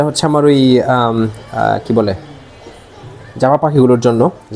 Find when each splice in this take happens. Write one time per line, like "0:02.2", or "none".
none